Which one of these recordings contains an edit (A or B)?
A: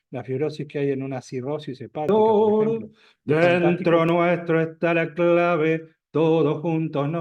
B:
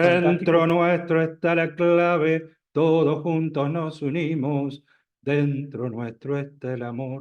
A